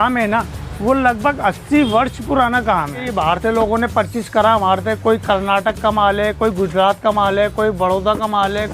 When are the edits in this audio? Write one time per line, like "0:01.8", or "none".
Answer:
0:03.1

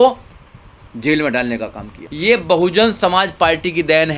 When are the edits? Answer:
0:02.1

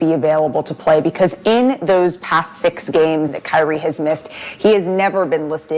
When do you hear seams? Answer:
0:03.3

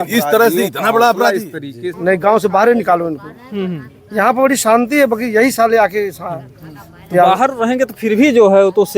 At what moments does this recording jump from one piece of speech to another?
0:01.9

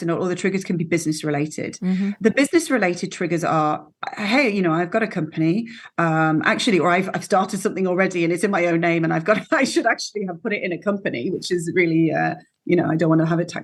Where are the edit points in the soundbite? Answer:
none

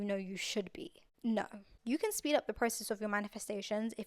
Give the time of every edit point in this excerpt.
0:01.0
0:01.7

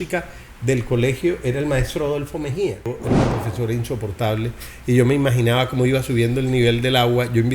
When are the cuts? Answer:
0:02.9

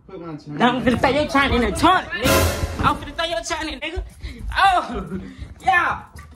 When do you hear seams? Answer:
0:03.8

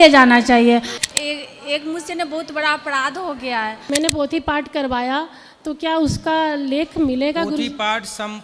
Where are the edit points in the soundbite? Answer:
0:01.0
0:03.9

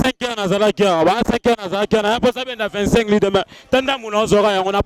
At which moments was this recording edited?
none

